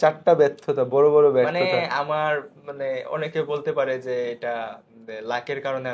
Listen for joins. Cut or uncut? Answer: uncut